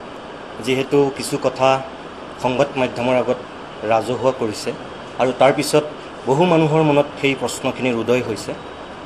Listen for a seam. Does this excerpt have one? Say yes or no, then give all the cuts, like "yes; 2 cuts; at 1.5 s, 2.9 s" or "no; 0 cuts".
no; 0 cuts